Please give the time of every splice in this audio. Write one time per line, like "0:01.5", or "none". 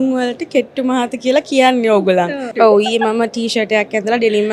0:02.5